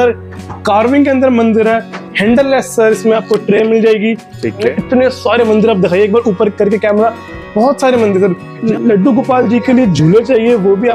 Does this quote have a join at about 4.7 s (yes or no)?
yes